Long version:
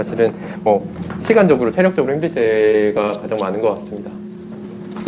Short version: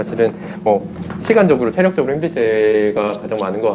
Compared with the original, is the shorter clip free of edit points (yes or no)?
yes